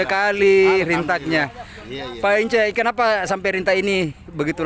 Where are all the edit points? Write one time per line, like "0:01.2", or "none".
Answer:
none